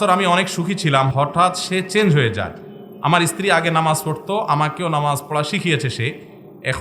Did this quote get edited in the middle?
yes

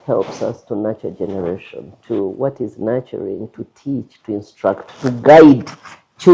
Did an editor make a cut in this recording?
no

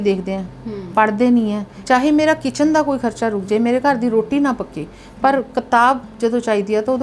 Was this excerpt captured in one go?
no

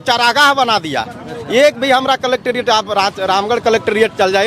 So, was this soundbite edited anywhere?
no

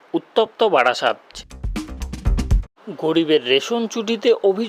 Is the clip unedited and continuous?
no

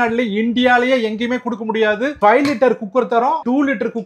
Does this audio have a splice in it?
yes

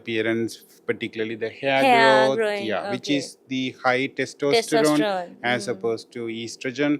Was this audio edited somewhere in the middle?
no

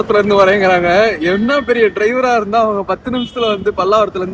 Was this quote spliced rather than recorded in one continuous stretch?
no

